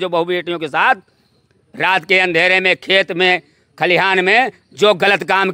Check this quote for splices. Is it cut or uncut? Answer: uncut